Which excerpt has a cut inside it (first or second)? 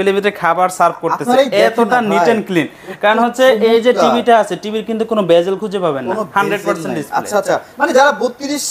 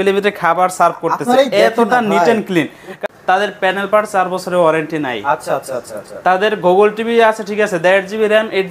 second